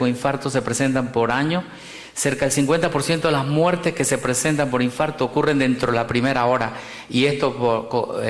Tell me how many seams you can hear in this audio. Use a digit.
1